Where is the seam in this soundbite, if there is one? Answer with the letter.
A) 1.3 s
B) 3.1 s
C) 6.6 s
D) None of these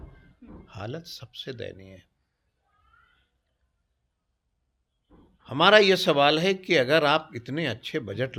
D